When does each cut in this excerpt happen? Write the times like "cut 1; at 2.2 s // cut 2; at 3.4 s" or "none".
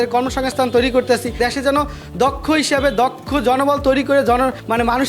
cut 1; at 1.4 s